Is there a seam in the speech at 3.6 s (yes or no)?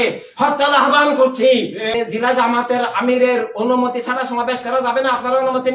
no